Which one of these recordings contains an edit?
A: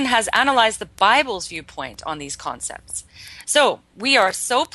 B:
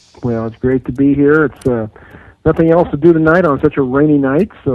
A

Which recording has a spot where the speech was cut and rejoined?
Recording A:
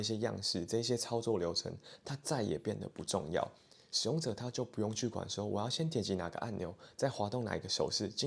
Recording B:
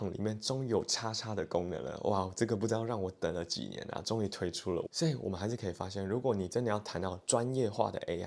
B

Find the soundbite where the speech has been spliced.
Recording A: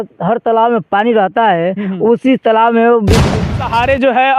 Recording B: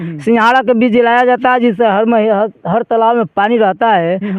A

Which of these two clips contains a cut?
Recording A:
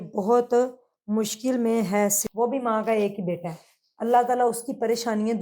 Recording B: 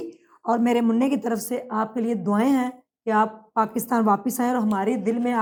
A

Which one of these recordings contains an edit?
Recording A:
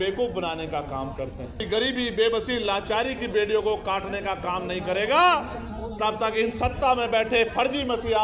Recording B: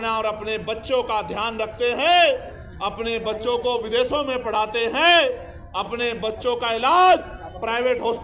A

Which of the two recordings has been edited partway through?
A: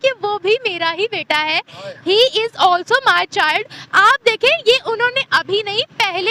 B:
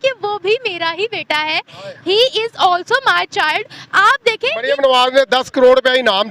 B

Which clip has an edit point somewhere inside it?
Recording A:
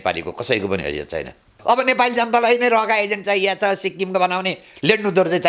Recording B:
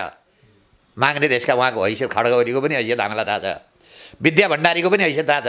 A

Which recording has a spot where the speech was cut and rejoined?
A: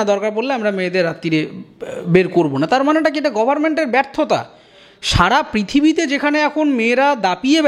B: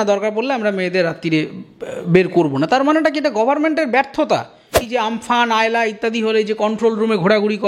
B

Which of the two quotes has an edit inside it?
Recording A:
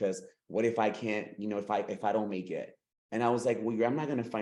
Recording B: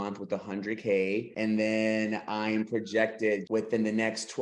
B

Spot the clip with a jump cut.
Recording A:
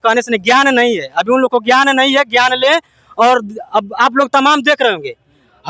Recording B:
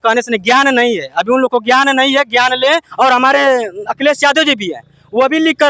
B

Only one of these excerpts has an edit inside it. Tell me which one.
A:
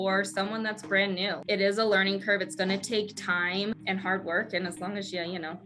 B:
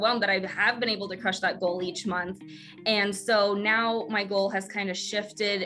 A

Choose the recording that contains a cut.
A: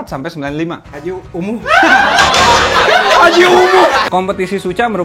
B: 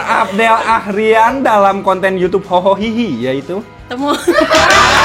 A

